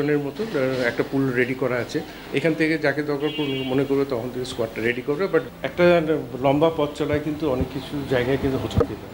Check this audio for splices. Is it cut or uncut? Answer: cut